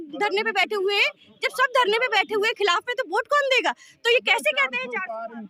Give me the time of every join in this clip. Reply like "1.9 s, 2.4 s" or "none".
none